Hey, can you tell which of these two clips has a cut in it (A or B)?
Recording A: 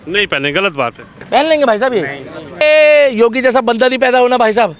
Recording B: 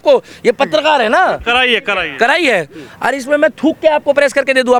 A